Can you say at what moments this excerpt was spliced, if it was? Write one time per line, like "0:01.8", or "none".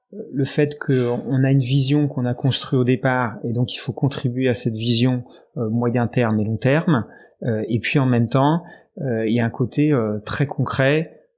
none